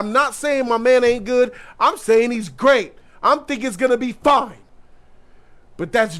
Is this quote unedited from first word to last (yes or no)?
yes